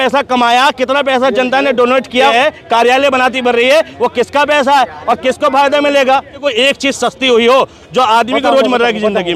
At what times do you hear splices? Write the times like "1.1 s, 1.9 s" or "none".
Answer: 2.3 s, 6.4 s